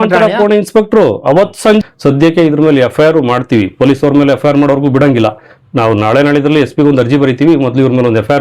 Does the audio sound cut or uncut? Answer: cut